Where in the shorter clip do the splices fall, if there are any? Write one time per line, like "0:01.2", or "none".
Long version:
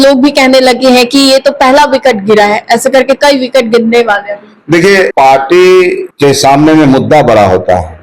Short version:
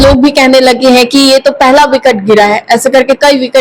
none